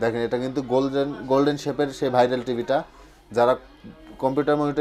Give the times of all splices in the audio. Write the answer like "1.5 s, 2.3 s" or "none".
none